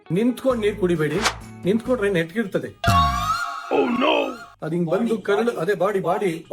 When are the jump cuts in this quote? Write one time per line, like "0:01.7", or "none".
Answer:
none